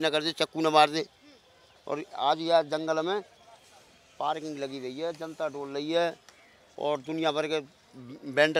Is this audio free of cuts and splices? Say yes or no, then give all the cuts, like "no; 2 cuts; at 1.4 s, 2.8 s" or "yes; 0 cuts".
yes; 0 cuts